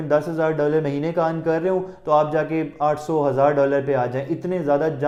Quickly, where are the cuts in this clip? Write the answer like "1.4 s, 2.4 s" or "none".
none